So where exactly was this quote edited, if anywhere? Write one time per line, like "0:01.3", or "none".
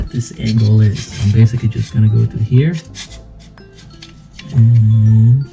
none